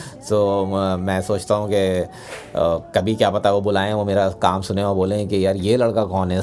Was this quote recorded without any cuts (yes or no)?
yes